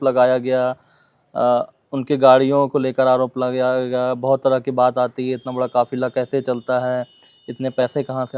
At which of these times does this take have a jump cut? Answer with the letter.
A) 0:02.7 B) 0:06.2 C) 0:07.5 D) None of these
D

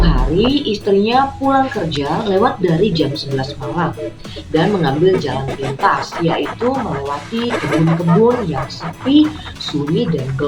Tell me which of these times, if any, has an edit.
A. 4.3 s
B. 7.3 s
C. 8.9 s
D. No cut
D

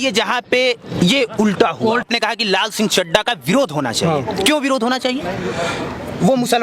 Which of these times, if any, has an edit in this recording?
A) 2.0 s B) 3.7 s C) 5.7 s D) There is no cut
A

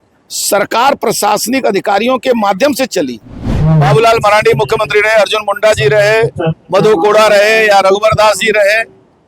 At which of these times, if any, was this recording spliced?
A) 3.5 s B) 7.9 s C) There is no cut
A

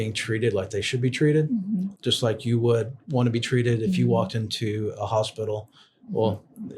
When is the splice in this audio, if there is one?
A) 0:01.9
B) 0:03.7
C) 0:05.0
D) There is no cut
A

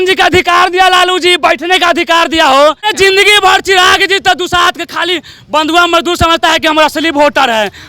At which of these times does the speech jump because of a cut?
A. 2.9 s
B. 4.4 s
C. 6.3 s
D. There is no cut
A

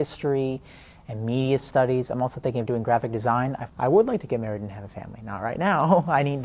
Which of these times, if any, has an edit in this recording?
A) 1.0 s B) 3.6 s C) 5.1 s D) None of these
B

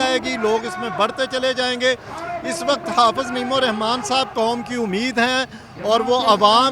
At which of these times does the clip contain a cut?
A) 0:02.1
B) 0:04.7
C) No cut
C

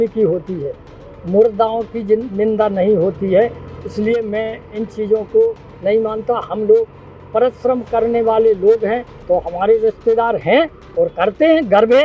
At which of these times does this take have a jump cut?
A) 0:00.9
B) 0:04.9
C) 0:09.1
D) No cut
C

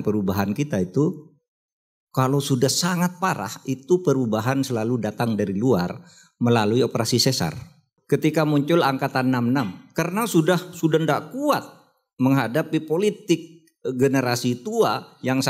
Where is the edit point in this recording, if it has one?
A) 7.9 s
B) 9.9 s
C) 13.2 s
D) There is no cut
A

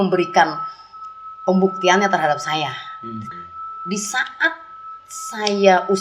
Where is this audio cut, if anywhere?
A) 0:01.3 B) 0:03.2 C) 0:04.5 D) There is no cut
B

